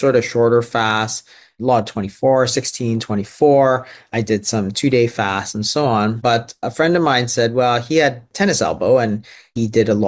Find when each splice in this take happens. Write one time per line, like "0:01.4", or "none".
none